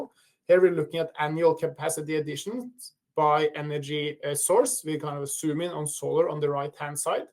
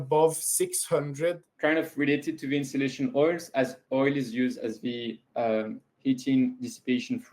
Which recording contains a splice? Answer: second; 1 cut; at 1.5 s

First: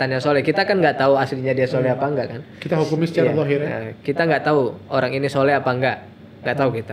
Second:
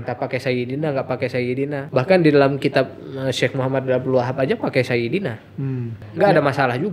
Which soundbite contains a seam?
second; 2 cuts; at 1.8 s, 6.0 s

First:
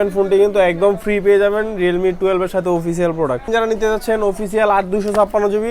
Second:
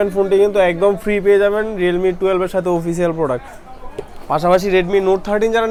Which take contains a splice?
first; 1 cut; at 3.5 s

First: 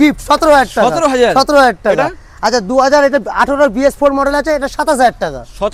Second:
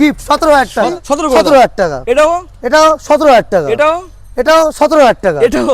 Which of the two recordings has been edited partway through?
second; 1 cut; at 0.9 s

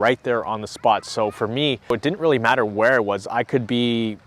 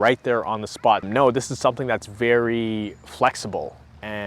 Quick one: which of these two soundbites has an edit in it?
second; 1 cut; at 1.0 s

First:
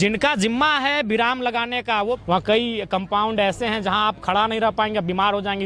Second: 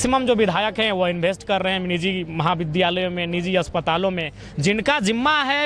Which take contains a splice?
first; 1 cut; at 2.2 s

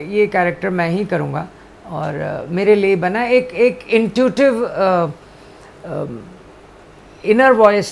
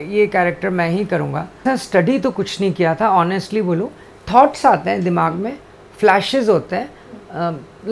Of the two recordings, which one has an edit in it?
second; 1 cut; at 1.9 s

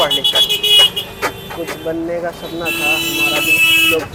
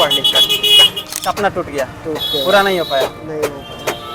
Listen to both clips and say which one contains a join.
second; 1 cut; at 1.3 s

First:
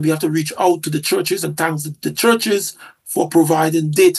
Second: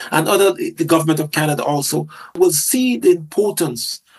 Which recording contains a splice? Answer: second; 1 cut; at 2.4 s

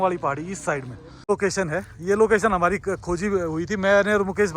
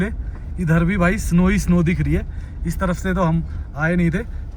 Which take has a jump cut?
first; 1 cut; at 1.2 s

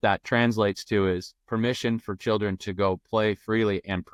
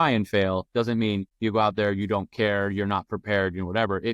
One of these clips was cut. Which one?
second; 1 cut; at 1.3 s

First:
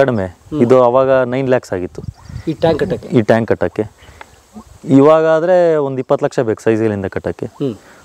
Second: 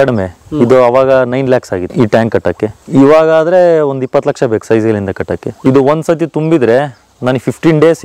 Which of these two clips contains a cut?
second; 3 cuts; at 1.9 s, 2.8 s, 5.5 s

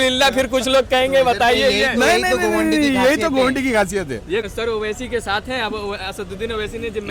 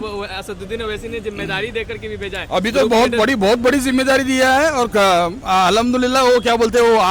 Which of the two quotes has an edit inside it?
first; 1 cut; at 4.5 s

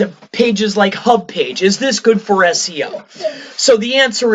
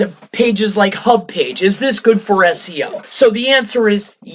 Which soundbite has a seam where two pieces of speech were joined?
second; 1 cut; at 3.0 s

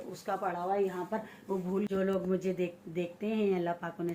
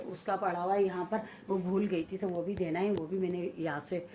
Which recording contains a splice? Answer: first; 1 cut; at 1.9 s

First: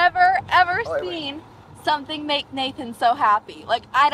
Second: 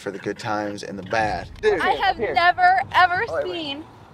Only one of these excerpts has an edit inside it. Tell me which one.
second; 1 cut; at 1.5 s

